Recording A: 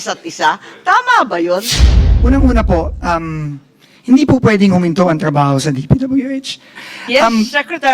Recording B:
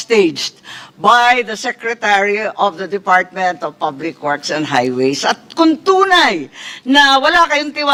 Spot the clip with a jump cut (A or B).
A